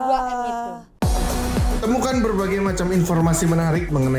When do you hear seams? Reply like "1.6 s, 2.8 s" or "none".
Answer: 1.0 s